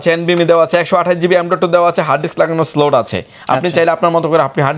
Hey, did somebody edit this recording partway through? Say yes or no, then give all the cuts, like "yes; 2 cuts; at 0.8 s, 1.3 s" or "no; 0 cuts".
no; 0 cuts